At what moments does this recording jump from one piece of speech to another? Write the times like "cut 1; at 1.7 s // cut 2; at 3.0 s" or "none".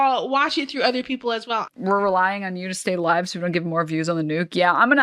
cut 1; at 1.7 s